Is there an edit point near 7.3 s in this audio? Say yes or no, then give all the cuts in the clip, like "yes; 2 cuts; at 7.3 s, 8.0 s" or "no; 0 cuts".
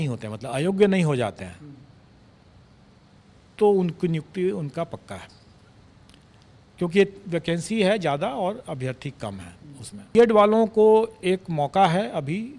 no; 1 cut; at 10.2 s